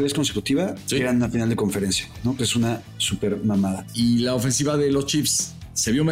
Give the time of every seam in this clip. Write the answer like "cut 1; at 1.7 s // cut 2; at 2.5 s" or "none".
cut 1; at 1.0 s // cut 2; at 3.8 s